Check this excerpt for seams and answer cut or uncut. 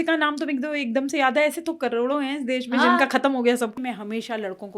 cut